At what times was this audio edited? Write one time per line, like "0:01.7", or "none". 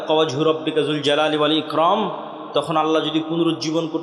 none